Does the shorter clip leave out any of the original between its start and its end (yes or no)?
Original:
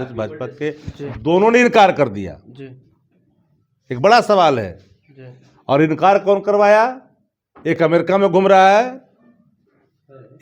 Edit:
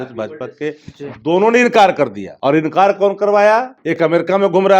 yes